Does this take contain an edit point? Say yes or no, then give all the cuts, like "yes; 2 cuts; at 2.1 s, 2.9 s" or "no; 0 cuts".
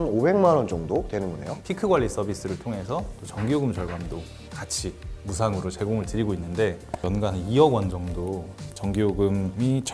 yes; 1 cut; at 1.5 s